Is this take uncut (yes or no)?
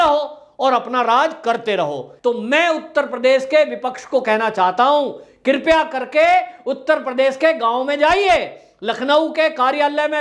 no